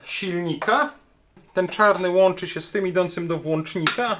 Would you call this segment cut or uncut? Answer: cut